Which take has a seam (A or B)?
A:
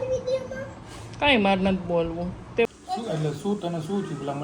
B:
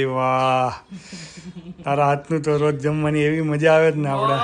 A